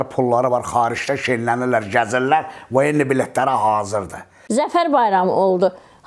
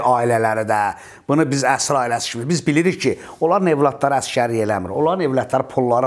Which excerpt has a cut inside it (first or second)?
first